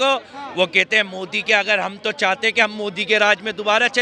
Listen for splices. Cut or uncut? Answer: uncut